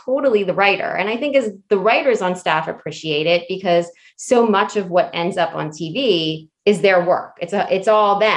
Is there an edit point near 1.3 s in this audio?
no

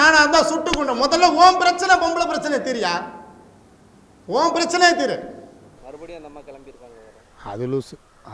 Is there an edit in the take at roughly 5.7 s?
yes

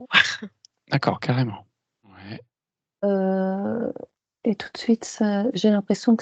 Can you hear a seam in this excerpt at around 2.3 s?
yes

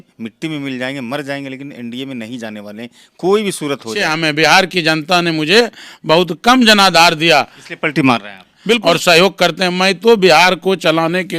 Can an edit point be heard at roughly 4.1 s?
yes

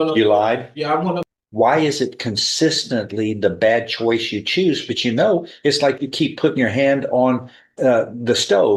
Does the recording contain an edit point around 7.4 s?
no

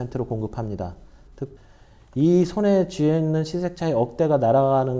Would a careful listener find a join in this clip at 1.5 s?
yes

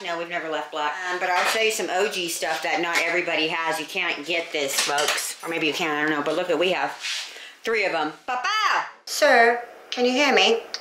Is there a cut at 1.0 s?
yes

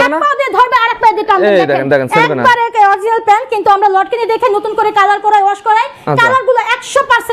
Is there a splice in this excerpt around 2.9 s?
no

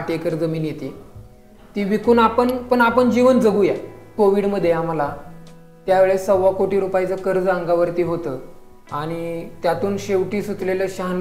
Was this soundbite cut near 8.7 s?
no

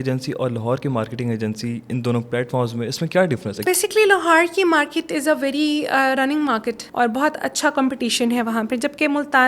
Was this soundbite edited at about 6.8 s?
yes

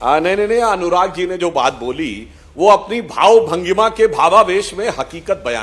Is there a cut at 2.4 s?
no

